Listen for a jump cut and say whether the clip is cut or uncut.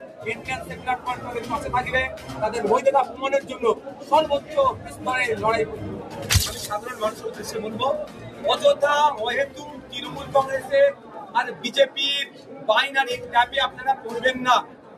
cut